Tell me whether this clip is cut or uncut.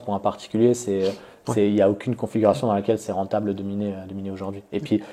uncut